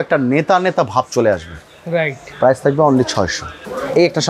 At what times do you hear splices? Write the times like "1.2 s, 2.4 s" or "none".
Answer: none